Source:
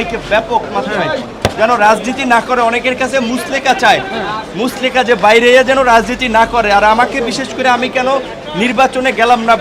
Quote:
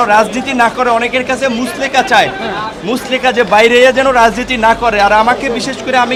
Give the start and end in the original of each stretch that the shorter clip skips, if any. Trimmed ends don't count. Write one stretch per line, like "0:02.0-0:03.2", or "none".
none